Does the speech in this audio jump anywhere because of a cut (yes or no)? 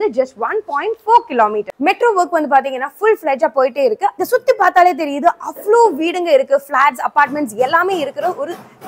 yes